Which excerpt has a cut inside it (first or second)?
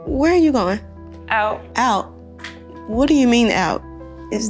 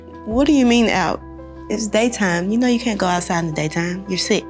first